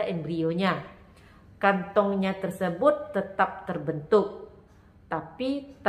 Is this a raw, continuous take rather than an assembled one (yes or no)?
yes